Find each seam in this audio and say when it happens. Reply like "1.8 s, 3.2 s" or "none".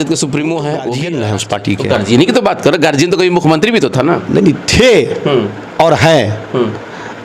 1.0 s